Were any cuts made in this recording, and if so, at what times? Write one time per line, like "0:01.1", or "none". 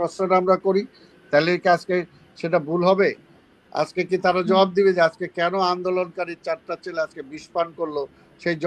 none